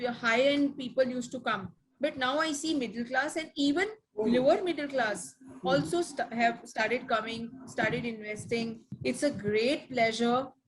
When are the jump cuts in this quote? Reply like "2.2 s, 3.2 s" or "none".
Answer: 8.9 s